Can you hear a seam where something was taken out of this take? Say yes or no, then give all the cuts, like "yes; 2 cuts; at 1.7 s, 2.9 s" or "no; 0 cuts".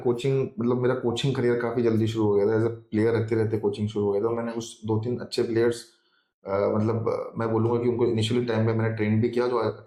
no; 0 cuts